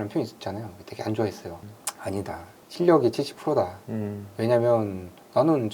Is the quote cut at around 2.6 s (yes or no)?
yes